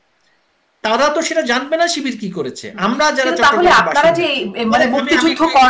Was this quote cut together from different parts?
no; 0 cuts

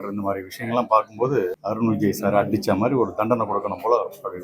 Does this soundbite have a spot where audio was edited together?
yes; 1 cut; at 1.6 s

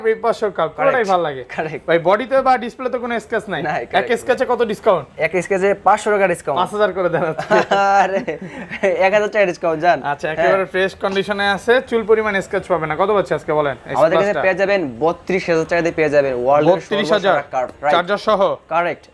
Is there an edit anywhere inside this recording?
no; 0 cuts

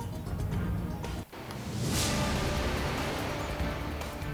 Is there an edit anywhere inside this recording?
no; 0 cuts

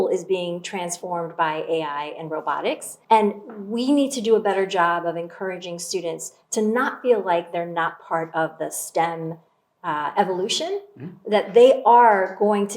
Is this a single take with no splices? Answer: no; 1 cut; at 2.9 s

